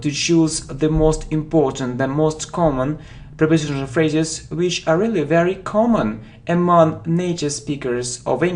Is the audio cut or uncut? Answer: uncut